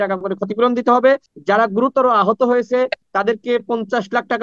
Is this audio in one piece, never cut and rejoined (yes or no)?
no